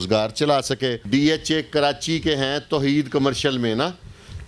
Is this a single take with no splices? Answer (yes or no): no